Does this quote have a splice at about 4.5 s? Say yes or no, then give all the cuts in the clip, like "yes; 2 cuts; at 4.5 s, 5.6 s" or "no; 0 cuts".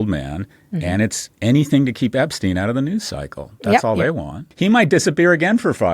yes; 1 cut; at 4.5 s